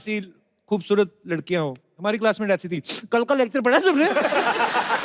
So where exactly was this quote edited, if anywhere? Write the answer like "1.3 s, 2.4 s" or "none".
1.9 s